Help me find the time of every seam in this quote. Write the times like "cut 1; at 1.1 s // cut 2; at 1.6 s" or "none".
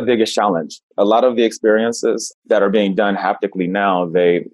cut 1; at 2.3 s